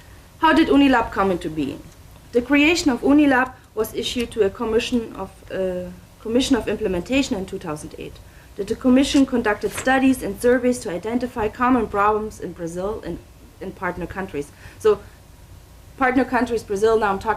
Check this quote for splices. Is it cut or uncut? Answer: cut